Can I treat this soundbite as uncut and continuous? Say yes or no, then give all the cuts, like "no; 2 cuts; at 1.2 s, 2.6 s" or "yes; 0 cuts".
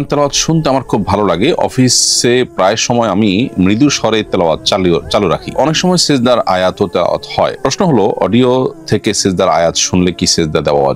yes; 0 cuts